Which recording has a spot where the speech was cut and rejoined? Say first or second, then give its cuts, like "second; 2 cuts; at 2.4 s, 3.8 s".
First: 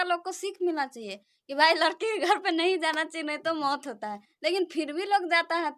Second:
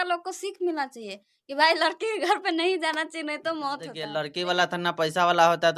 second; 1 cut; at 4.0 s